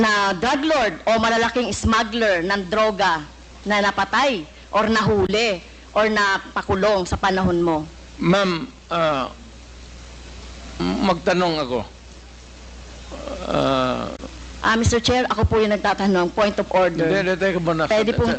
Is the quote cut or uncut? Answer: uncut